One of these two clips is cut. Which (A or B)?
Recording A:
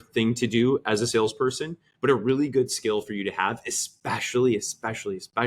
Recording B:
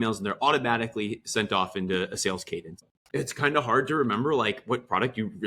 B